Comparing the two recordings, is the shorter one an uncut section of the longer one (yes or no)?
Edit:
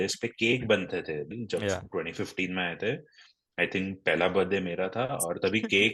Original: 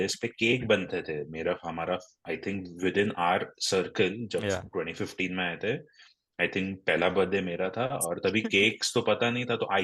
no